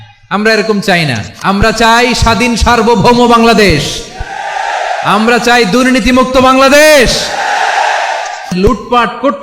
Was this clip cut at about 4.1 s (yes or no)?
no